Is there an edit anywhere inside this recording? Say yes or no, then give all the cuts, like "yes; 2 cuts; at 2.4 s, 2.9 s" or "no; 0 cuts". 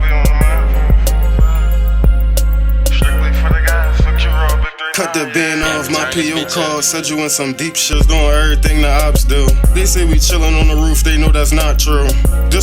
yes; 1 cut; at 7.8 s